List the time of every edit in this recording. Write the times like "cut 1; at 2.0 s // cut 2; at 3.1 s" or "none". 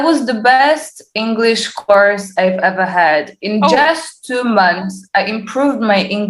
none